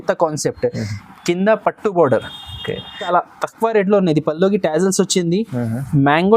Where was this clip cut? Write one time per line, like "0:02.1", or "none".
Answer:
0:03.1